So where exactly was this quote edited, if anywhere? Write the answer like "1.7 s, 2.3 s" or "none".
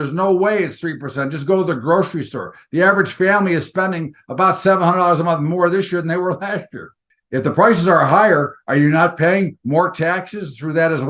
6.8 s